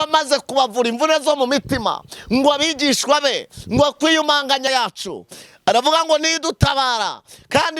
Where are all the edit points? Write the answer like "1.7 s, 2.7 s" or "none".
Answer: 4.7 s